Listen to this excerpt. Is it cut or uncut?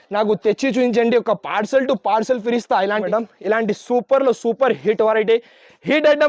cut